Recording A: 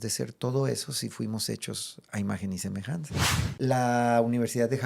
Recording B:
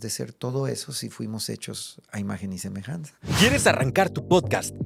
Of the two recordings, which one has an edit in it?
A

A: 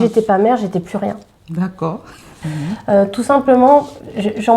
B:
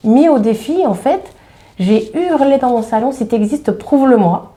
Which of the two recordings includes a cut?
A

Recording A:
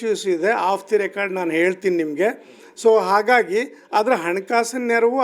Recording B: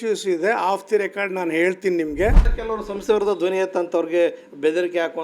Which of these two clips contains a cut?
B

